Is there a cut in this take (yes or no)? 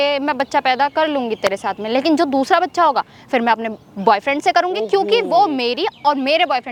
no